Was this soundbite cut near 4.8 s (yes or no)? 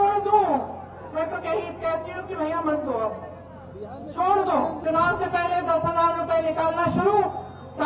yes